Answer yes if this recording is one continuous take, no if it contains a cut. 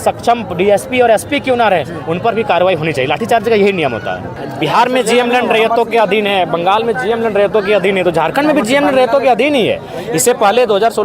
no